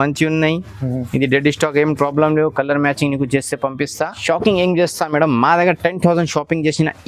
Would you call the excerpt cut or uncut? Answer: cut